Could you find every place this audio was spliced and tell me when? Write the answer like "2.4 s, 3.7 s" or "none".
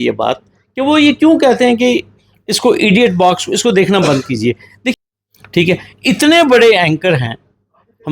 5.0 s